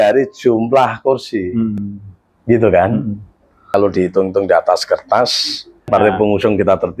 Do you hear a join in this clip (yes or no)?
yes